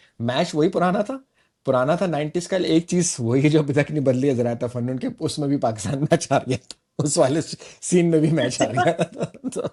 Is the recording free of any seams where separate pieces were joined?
yes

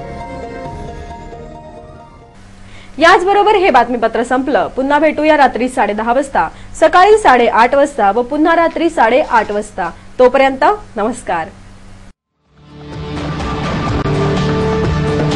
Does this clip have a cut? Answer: no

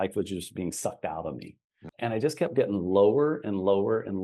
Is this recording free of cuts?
no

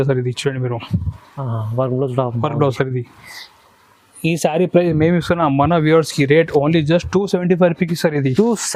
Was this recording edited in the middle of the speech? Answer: no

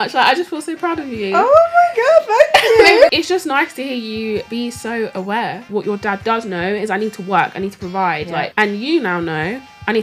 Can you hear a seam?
yes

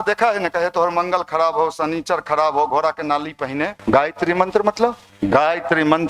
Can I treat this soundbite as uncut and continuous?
no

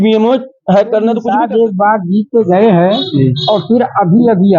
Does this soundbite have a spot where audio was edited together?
yes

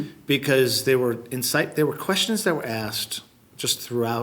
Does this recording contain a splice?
no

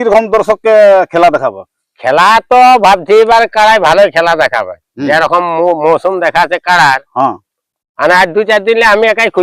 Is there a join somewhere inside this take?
no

